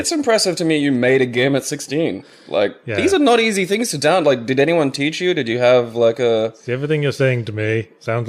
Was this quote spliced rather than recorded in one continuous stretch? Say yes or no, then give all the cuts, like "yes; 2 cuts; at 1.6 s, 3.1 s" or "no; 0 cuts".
no; 0 cuts